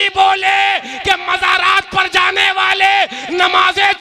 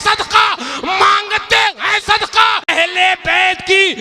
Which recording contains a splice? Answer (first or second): second